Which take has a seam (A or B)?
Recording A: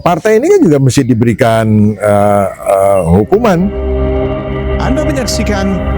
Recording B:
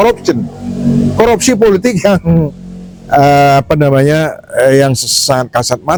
A